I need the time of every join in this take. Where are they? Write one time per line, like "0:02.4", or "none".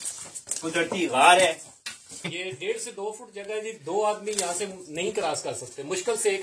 0:02.3

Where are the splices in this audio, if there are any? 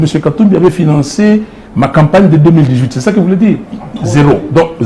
none

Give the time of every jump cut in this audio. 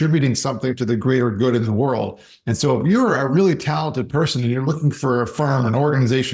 none

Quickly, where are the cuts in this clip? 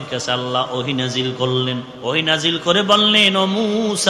0:01.9

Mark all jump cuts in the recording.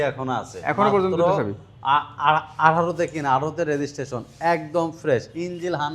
none

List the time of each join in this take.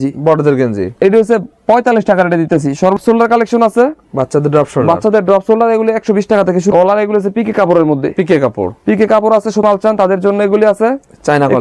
0:03.0
0:06.7
0:09.6

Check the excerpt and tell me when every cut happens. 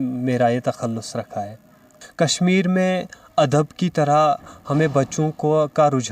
0:02.0

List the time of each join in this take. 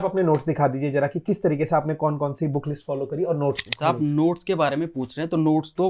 none

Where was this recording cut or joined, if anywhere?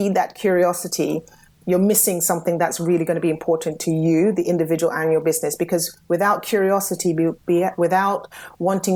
0:01.6

